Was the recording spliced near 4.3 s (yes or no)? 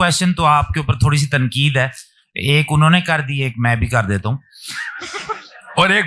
no